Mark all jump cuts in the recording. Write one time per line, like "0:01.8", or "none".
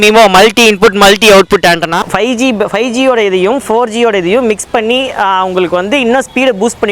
0:02.0